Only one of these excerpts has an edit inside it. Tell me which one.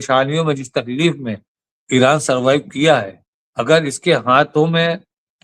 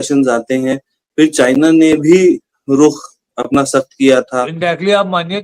second; 1 cut; at 4.5 s

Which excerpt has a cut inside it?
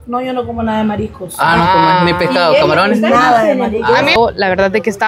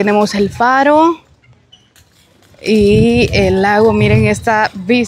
first; 1 cut; at 4.2 s

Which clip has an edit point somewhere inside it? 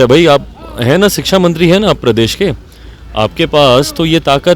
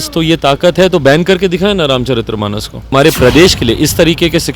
second; 1 cut; at 2.9 s

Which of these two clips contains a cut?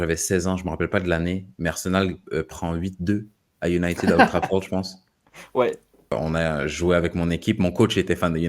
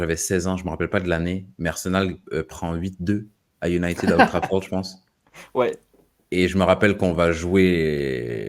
first; 1 cut; at 6.1 s

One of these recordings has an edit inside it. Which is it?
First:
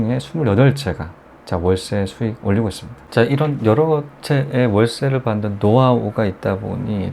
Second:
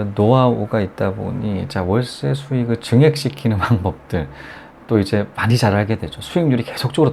first; 1 cut; at 3.0 s

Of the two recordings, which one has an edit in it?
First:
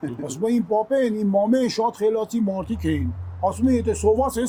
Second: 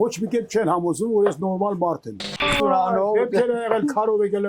second; 1 cut; at 2.4 s

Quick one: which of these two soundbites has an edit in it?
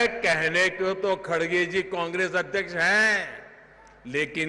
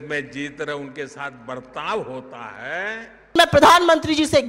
second; 1 cut; at 3.3 s

